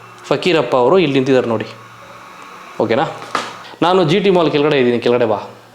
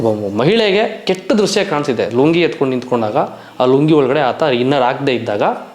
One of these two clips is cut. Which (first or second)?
first